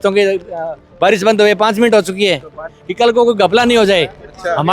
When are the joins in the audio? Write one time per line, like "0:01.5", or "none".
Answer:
0:02.8

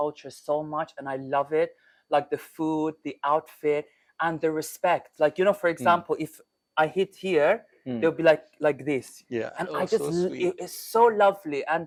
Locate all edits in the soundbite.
none

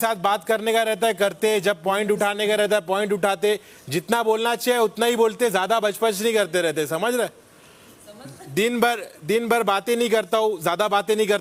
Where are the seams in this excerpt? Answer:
none

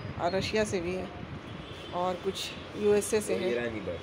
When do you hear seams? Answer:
none

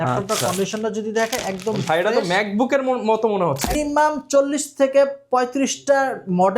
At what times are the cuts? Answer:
0:03.8

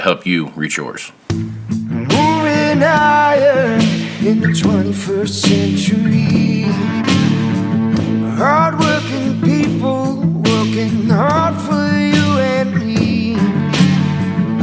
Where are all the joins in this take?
0:01.1

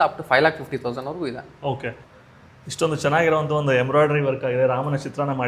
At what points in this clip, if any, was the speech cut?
0:02.0

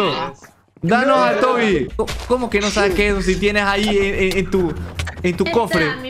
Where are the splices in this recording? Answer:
0:01.9

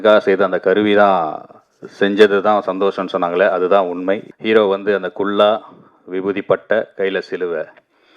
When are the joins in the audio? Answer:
0:04.3

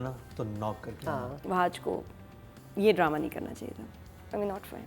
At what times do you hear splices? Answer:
0:01.3

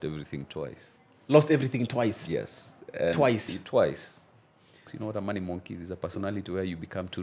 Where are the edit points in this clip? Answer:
0:04.9

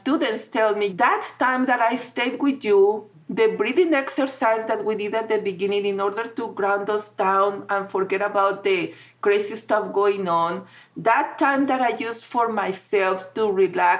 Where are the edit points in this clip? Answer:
0:00.9

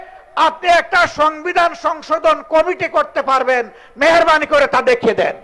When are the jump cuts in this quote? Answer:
none

